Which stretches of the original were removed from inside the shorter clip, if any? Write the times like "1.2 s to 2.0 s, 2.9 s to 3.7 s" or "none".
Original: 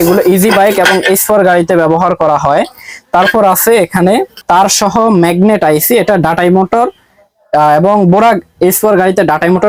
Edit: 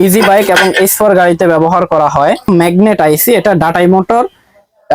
2.8 s to 5.1 s